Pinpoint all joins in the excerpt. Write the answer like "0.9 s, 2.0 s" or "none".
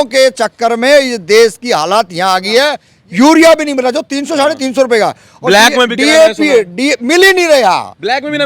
2.9 s